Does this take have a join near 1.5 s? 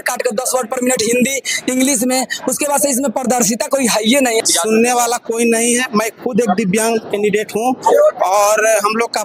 no; 1 cut; at 4.5 s

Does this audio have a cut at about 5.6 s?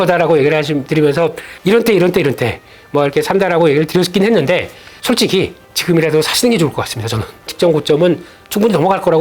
no; 2 cuts; at 1.5 s, 7.5 s

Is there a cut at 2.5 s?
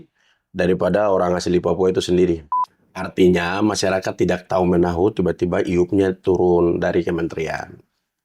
yes; 1 cut; at 2.5 s

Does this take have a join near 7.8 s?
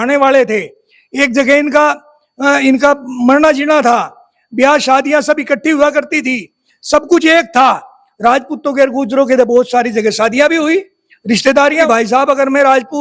no; 1 cut; at 11.9 s

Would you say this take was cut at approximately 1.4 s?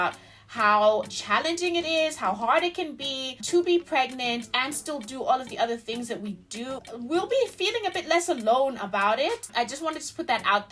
no; 2 cuts; at 6.8 s, 9.5 s

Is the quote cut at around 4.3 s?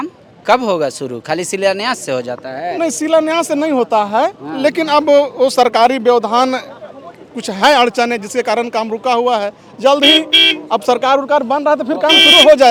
no; 0 cuts

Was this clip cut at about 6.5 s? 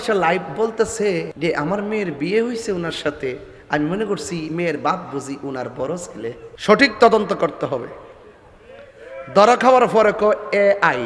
yes; 2 cuts; at 1.3 s, 6.5 s

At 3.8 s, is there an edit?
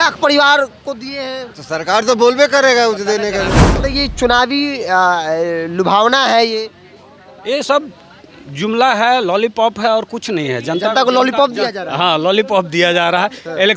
yes; 1 cut; at 3.8 s

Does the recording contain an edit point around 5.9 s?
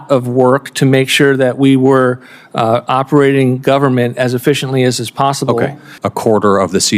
yes; 1 cut; at 5.9 s

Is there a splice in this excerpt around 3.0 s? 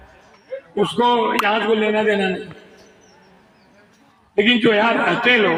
no; 0 cuts

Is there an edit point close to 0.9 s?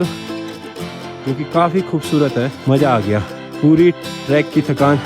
no; 2 cuts; at 2.6 s, 3.4 s

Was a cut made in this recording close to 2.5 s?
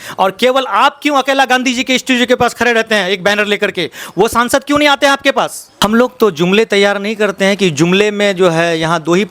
no; 1 cut; at 5.6 s

